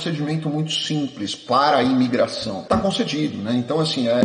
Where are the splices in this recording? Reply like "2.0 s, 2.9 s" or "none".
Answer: 2.5 s